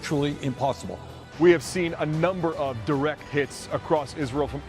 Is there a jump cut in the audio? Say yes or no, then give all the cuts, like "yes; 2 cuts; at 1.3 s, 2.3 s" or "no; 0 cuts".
yes; 1 cut; at 1.1 s